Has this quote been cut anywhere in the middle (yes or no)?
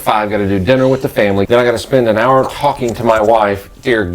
yes